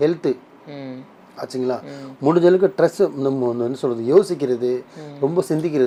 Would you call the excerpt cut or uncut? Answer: uncut